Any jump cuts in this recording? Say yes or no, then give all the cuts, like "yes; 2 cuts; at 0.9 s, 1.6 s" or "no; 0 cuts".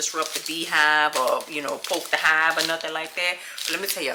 no; 0 cuts